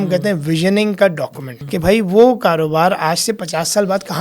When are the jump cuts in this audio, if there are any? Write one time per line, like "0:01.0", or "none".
0:01.5